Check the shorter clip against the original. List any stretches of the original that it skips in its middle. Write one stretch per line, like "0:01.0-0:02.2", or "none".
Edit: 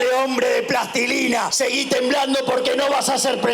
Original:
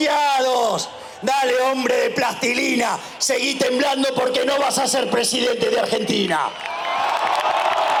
0:03.0-0:03.2